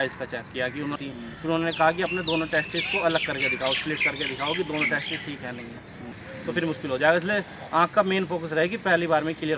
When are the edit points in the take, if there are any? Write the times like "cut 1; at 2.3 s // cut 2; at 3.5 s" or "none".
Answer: cut 1; at 1.0 s // cut 2; at 6.1 s